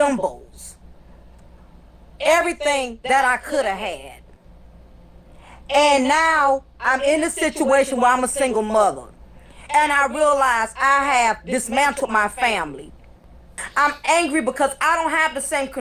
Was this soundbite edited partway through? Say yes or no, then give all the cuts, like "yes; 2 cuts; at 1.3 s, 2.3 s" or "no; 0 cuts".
yes; 1 cut; at 13.6 s